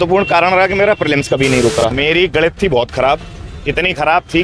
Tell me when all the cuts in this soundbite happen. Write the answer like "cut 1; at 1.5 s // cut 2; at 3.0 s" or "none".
cut 1; at 1.9 s